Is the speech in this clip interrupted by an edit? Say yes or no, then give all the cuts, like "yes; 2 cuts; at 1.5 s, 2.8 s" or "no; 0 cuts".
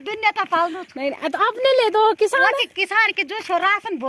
no; 0 cuts